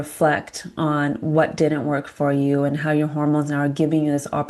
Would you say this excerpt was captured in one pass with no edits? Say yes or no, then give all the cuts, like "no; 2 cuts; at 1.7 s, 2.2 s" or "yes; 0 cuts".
yes; 0 cuts